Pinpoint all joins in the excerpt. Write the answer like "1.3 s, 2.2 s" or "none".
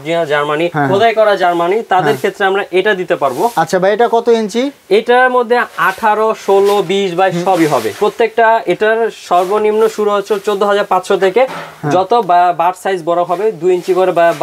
none